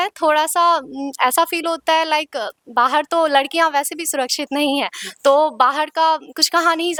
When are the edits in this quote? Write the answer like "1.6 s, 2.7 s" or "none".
none